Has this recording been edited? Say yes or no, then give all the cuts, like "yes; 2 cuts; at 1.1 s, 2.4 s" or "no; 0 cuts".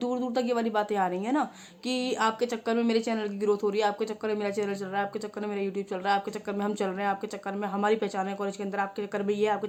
no; 0 cuts